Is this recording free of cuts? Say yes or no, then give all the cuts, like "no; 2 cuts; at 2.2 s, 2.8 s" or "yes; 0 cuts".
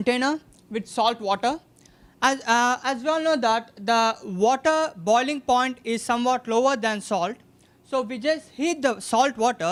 yes; 0 cuts